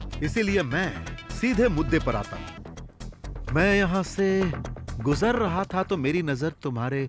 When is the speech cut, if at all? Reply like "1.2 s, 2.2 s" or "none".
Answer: 2.6 s